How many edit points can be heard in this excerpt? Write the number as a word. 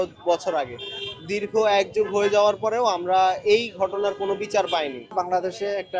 one